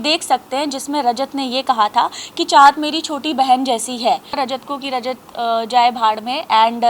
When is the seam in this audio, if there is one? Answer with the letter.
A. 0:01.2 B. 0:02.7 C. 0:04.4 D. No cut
C